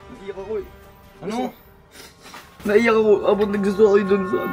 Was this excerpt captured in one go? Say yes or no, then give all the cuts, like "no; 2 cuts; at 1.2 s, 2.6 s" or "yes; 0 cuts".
yes; 0 cuts